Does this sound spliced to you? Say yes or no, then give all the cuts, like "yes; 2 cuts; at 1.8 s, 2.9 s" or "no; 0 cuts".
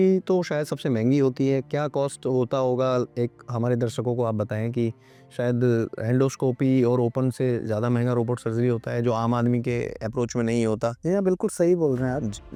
no; 0 cuts